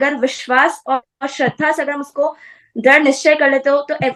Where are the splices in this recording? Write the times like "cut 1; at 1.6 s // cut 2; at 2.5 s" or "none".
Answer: none

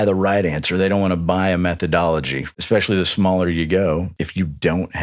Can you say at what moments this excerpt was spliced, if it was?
cut 1; at 2.4 s // cut 2; at 4.1 s

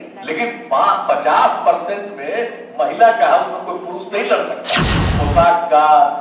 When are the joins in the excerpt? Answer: cut 1; at 5.0 s

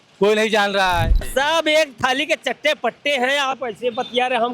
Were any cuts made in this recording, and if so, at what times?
cut 1; at 1.2 s

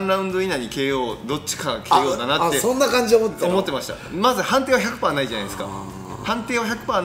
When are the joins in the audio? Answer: none

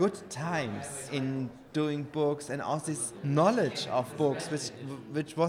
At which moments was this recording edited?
cut 1; at 1.1 s // cut 2; at 3.1 s // cut 3; at 4.1 s

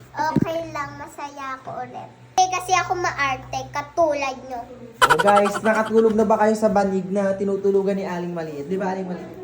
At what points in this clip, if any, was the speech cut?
cut 1; at 2.4 s

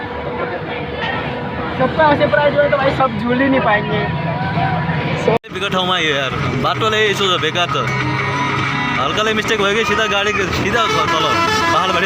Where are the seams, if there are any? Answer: cut 1; at 5.4 s

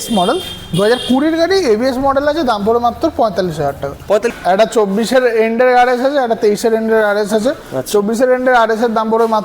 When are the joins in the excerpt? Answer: cut 1; at 4.3 s

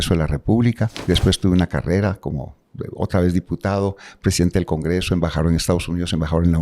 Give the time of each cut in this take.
cut 1; at 0.9 s

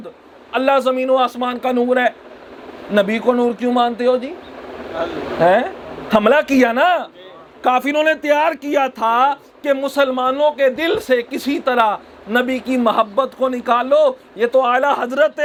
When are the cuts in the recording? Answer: none

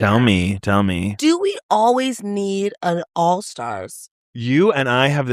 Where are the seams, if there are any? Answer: cut 1; at 1.1 s

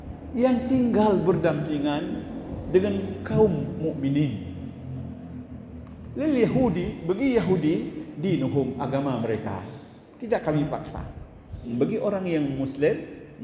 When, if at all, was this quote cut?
cut 1; at 11.7 s

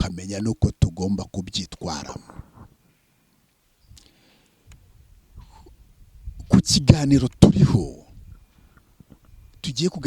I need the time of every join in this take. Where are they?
cut 1; at 3.6 s

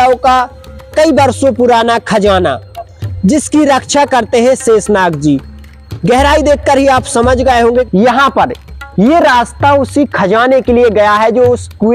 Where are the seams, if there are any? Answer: cut 1; at 7.6 s

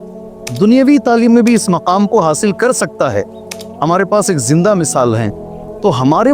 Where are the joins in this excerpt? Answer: none

